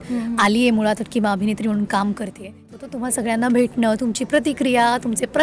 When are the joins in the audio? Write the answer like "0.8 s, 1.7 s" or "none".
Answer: 2.8 s